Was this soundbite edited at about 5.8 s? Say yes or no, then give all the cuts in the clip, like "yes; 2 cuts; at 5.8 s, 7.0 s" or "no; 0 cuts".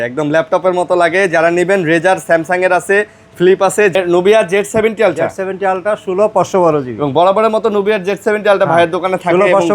no; 1 cut; at 3.9 s